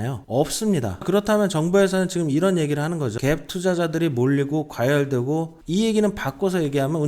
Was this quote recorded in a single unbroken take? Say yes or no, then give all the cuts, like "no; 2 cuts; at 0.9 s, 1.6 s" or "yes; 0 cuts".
no; 2 cuts; at 0.9 s, 5.5 s